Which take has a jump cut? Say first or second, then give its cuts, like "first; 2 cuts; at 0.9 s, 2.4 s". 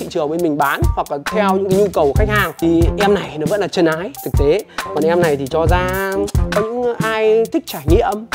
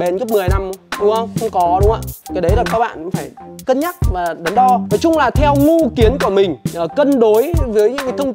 second; 1 cut; at 4.8 s